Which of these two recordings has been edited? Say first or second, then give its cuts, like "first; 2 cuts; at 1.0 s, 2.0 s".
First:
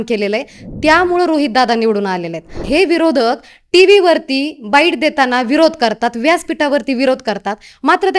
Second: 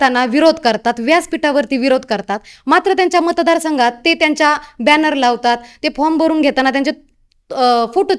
first; 1 cut; at 2.6 s